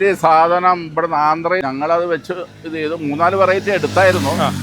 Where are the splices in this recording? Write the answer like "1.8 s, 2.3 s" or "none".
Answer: 1.6 s